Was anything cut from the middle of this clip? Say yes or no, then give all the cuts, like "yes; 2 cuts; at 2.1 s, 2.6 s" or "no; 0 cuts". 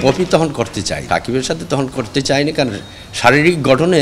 yes; 1 cut; at 1.0 s